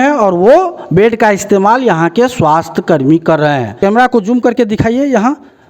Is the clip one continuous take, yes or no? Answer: no